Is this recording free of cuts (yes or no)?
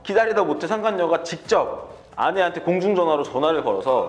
yes